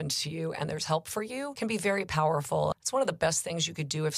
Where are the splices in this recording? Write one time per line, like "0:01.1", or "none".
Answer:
0:01.5
0:02.7